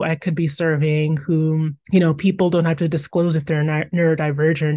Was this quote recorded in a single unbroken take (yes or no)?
yes